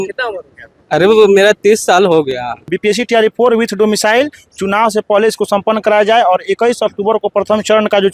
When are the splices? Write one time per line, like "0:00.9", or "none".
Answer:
0:02.7